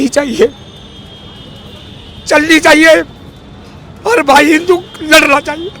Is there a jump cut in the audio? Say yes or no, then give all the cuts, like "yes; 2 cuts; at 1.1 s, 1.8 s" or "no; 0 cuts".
no; 0 cuts